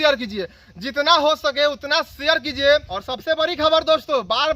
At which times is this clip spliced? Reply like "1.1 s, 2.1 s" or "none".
3.0 s

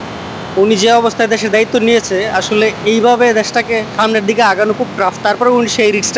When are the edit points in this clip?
none

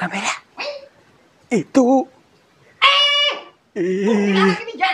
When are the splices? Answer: none

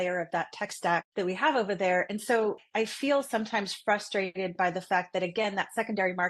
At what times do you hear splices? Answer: 1.1 s, 2.6 s

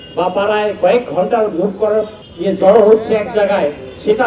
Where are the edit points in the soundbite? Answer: 2.2 s

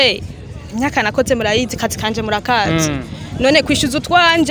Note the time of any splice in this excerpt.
none

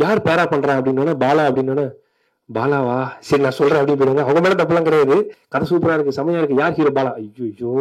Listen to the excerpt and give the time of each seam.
5.4 s

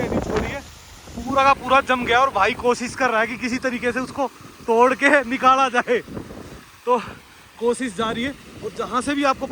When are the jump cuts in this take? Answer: none

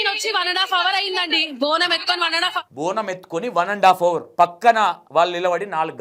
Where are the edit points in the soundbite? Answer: 2.7 s, 4.2 s, 5.0 s

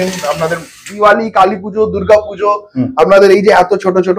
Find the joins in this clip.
0.9 s

